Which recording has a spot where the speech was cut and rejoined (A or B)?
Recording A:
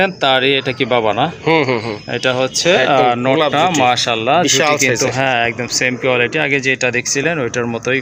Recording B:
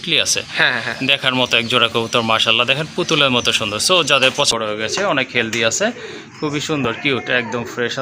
B